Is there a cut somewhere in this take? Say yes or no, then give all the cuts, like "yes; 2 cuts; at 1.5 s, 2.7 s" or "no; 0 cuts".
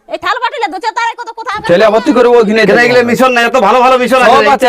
yes; 1 cut; at 1.6 s